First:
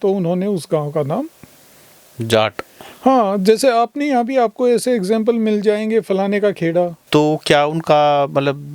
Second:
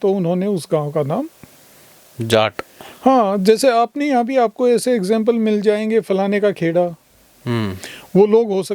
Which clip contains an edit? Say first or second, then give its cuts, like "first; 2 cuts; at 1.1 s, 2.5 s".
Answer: first; 1 cut; at 7.0 s